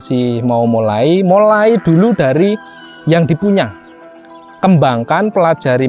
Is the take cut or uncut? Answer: uncut